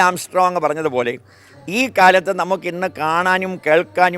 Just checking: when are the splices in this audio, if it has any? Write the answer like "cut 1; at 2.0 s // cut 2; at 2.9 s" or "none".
none